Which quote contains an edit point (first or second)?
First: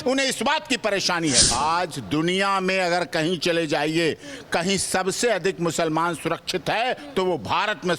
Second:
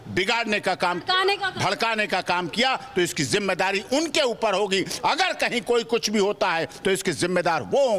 first